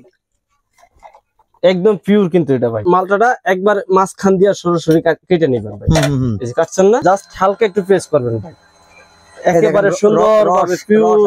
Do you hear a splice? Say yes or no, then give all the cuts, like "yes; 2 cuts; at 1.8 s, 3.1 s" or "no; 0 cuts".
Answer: yes; 2 cuts; at 2.8 s, 7.0 s